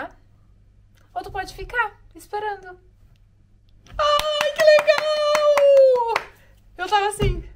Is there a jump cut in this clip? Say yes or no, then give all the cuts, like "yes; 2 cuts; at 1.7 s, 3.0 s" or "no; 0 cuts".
no; 0 cuts